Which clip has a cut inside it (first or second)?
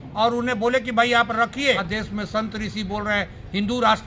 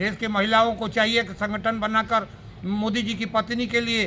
first